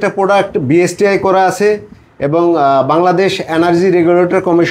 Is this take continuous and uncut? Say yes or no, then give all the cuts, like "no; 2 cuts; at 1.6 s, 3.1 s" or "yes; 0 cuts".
yes; 0 cuts